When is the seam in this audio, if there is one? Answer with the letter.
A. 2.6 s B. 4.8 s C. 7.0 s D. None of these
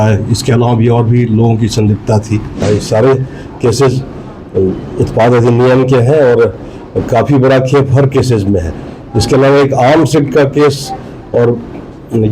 A